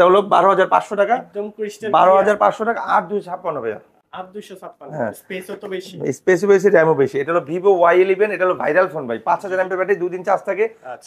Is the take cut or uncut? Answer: uncut